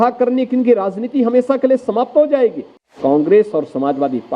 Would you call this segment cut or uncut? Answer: cut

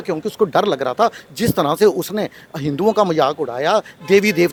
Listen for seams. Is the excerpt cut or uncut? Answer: uncut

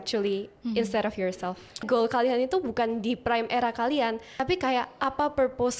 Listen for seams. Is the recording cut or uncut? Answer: cut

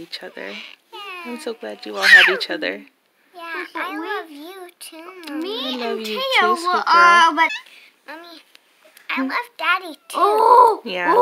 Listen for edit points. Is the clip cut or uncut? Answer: cut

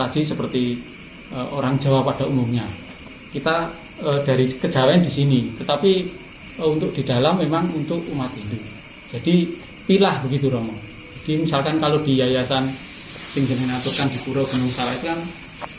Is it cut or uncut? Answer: uncut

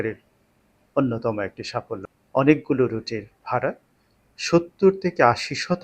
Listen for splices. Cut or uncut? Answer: cut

